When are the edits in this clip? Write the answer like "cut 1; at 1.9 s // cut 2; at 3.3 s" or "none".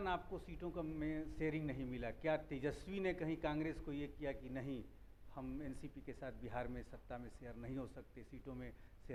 none